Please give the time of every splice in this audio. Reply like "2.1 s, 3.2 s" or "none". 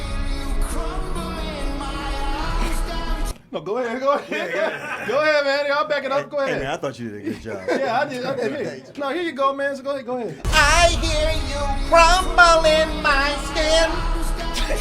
none